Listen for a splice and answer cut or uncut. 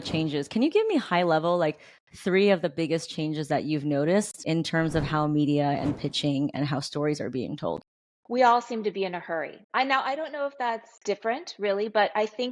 uncut